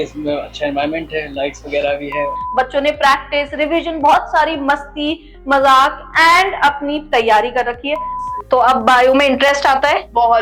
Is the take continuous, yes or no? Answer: no